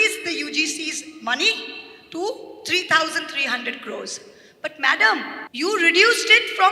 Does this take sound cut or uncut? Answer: cut